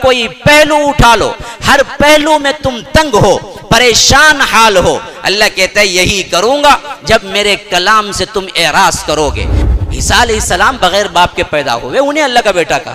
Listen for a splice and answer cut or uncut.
cut